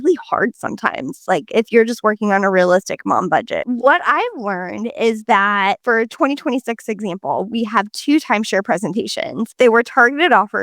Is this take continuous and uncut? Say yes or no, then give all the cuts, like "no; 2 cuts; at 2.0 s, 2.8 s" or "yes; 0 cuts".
no; 1 cut; at 3.6 s